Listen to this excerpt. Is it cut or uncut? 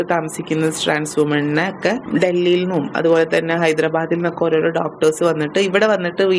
cut